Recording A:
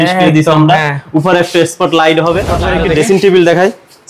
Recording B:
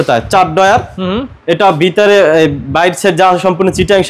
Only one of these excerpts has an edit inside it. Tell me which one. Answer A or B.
A